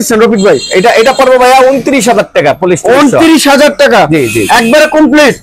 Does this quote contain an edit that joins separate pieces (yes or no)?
no